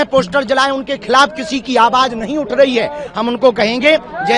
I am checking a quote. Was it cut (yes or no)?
no